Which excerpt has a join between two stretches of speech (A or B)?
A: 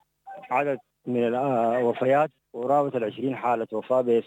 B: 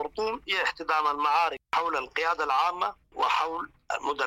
A